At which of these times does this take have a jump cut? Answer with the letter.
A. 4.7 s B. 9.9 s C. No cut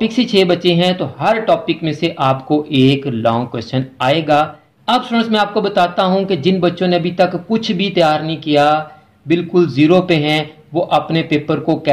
A